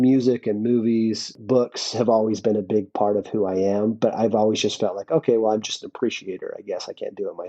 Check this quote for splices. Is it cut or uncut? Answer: cut